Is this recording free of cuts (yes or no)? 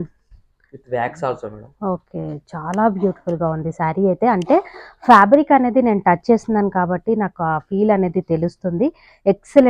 yes